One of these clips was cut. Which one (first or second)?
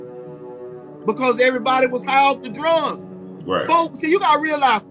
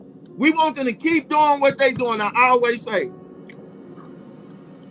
second